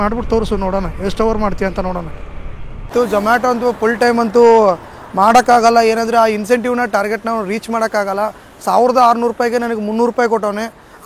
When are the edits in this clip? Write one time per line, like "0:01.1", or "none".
0:02.9